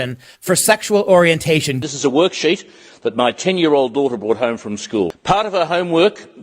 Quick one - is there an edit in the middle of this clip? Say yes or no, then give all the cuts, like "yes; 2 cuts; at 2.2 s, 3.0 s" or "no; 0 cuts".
yes; 2 cuts; at 1.8 s, 5.1 s